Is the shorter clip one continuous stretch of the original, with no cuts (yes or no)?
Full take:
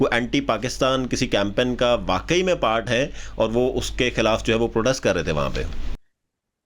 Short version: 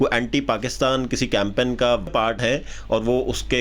no